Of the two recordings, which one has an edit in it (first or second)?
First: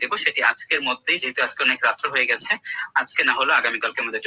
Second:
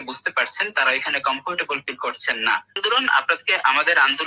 second